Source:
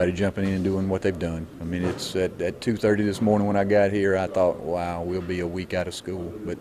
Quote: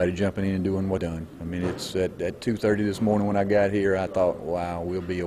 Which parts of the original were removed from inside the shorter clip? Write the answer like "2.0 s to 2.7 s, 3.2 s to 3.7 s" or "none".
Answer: 1.0 s to 1.2 s